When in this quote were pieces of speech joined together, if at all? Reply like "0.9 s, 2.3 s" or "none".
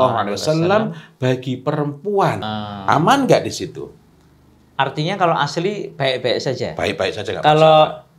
2.5 s